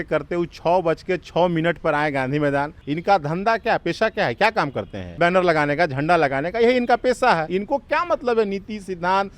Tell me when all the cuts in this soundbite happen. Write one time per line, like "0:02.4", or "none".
0:02.8
0:05.2
0:07.5